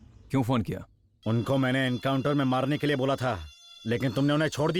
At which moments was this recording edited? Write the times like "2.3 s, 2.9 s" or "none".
none